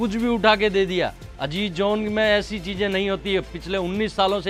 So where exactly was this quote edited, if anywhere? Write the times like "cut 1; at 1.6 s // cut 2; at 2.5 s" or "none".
none